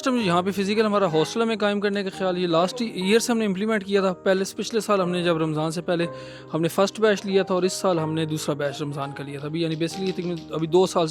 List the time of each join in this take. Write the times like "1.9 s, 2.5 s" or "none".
none